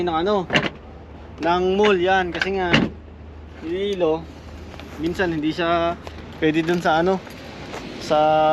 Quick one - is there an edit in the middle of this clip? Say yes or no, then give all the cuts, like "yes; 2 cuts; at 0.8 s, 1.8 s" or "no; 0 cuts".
no; 0 cuts